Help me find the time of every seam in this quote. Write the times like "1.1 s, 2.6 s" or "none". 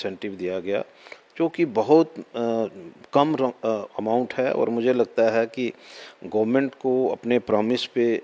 none